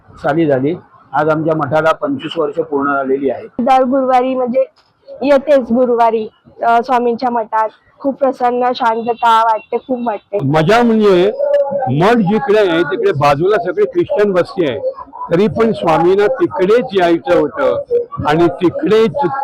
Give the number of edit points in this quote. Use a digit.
2